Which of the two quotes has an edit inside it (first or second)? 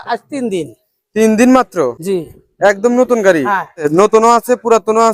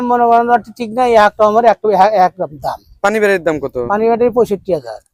first